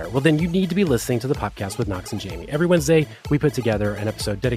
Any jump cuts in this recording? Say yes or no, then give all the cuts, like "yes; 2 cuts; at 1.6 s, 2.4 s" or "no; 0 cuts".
no; 0 cuts